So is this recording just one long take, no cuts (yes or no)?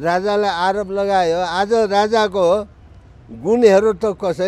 yes